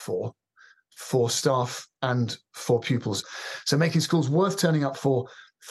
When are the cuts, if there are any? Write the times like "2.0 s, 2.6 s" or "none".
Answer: 3.2 s